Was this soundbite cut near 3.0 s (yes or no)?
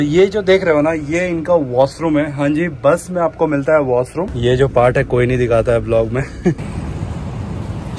no